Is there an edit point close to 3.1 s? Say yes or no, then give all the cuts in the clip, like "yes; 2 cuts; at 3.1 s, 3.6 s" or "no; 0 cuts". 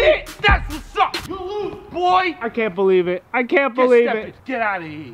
no; 0 cuts